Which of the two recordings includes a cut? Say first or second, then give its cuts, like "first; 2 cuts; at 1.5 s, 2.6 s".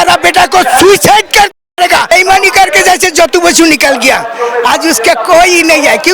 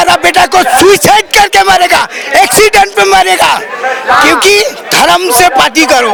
first; 1 cut; at 2.1 s